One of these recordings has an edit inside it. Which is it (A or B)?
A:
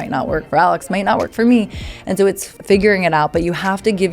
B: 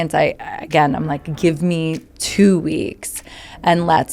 A